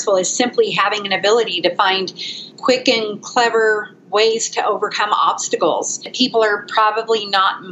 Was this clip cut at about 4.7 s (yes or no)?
no